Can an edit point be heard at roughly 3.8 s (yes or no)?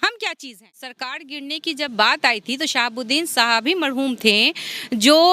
no